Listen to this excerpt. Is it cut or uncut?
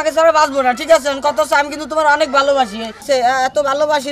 cut